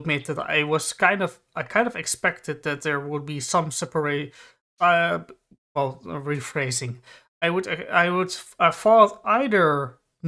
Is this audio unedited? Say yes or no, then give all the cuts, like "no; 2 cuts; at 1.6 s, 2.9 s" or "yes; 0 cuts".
yes; 0 cuts